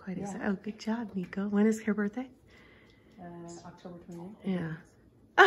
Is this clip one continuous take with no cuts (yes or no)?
yes